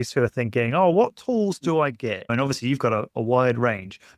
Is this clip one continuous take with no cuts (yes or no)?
no